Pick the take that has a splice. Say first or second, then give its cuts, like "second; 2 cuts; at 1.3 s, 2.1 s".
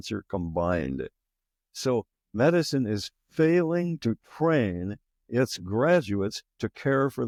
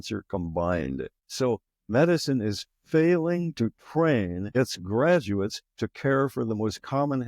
second; 2 cuts; at 1.2 s, 4.4 s